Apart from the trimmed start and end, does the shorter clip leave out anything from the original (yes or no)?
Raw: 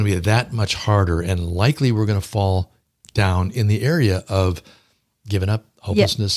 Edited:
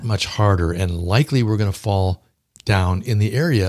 no